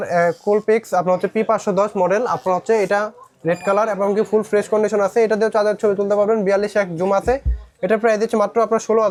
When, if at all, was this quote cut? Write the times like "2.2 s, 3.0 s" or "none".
none